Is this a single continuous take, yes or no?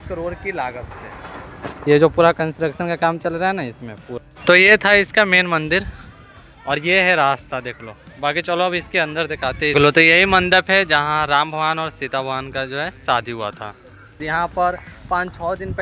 no